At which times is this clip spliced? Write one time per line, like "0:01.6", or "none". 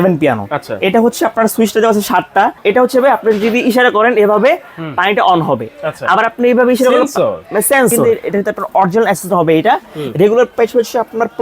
0:02.6
0:08.3

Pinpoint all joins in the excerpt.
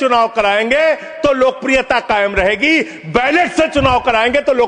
none

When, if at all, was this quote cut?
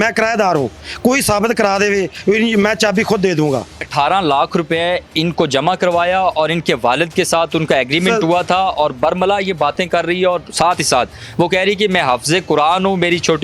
0:03.9

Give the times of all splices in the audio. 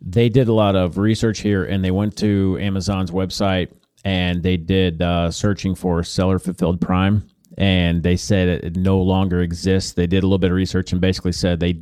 none

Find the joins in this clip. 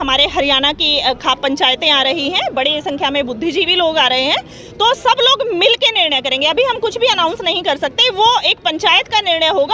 none

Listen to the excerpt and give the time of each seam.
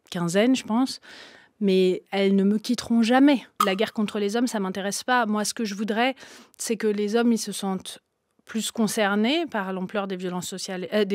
0:03.5

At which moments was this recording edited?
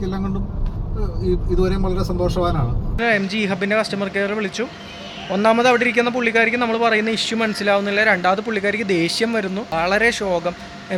0:03.0
0:09.7

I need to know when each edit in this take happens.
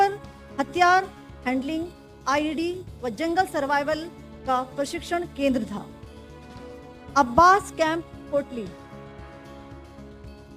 0:08.7

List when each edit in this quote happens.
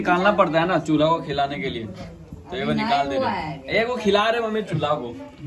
none

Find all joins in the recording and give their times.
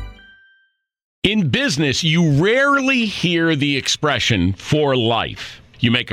0:01.2

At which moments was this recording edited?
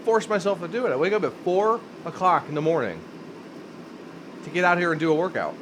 none

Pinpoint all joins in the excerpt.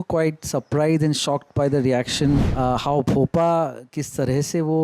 0:02.5

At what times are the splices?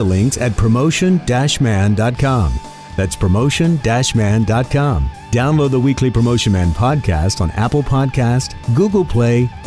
0:08.6

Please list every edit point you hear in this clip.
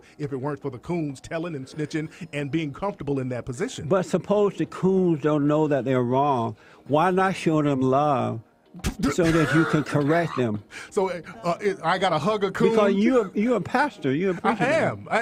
none

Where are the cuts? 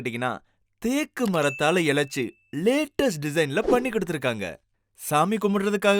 none

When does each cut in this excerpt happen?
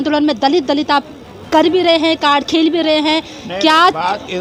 none

